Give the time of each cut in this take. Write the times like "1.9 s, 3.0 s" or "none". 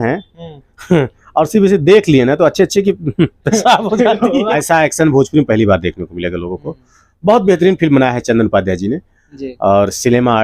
4.5 s